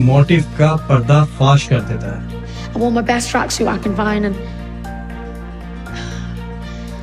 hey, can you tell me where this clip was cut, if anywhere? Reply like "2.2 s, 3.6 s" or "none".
none

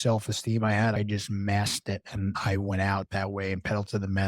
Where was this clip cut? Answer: 0.9 s, 2.4 s

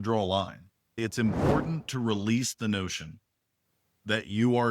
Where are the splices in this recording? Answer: 1.0 s

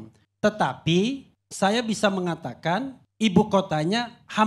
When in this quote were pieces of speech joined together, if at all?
none

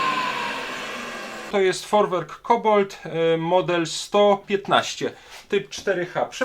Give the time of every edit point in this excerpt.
1.5 s

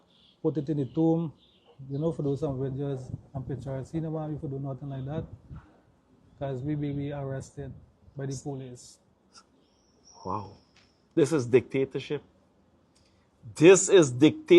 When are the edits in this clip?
7.1 s

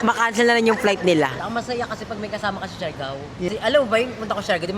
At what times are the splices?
1.4 s, 3.5 s

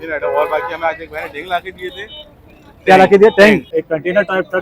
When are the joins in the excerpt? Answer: 3.7 s

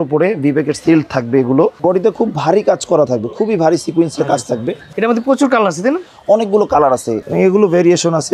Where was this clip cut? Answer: 1.8 s, 4.8 s, 7.2 s

